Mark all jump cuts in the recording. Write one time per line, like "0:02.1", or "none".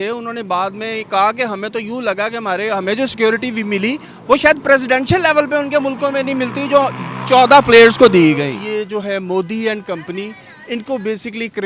0:08.5